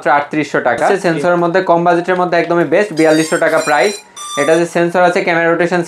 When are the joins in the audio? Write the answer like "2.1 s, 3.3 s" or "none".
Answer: 1.0 s

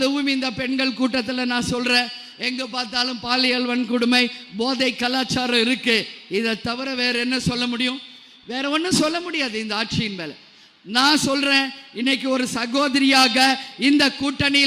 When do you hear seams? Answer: none

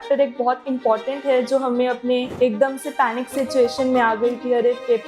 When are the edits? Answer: 2.3 s

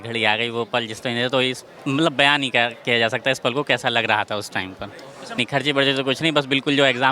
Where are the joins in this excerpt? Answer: 5.4 s

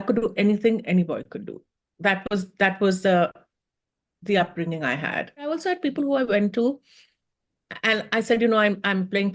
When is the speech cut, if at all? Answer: 5.5 s

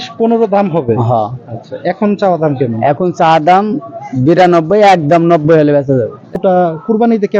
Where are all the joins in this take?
6.2 s

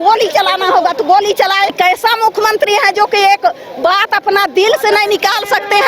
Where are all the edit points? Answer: 1.7 s

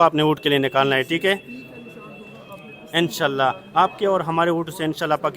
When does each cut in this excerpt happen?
none

